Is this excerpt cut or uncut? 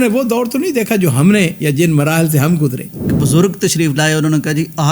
cut